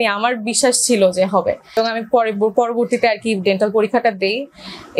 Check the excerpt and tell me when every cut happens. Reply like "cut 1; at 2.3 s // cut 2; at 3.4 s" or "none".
cut 1; at 1.8 s

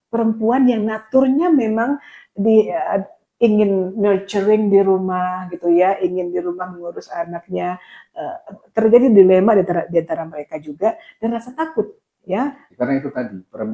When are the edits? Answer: cut 1; at 12.6 s

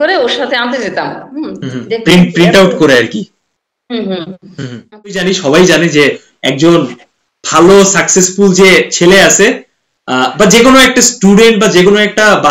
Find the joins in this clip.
cut 1; at 5.1 s

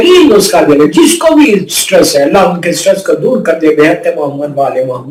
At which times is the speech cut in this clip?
none

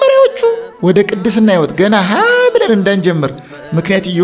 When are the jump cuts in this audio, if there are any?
none

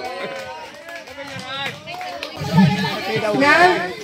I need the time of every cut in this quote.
cut 1; at 2.3 s

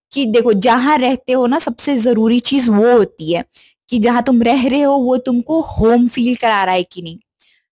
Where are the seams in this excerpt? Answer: none

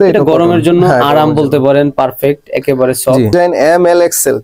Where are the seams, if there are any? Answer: cut 1; at 3.3 s

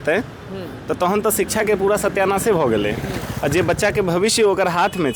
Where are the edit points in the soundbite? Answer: none

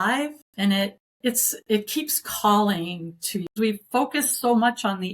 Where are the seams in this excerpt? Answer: cut 1; at 1.1 s // cut 2; at 3.5 s

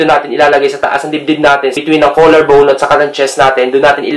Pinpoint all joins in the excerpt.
cut 1; at 1.8 s

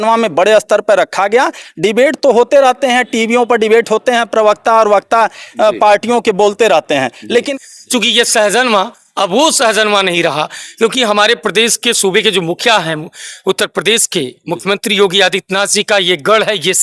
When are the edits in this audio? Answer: cut 1; at 7.5 s

